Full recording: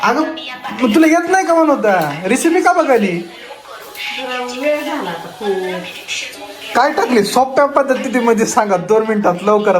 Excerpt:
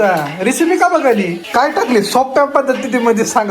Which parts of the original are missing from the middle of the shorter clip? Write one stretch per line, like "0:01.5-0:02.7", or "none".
0:03.2-0:06.6